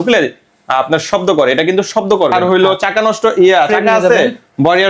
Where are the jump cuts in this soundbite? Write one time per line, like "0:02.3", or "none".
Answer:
0:02.3